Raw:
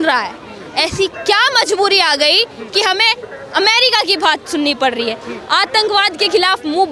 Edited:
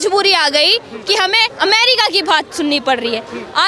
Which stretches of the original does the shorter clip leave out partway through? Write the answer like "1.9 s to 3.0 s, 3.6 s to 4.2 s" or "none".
3.2 s to 3.5 s